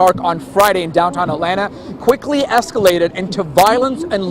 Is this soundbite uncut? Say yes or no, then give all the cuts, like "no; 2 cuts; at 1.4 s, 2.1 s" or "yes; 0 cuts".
yes; 0 cuts